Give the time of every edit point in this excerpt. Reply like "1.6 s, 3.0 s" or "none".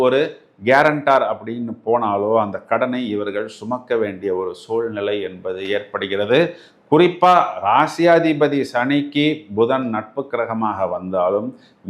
none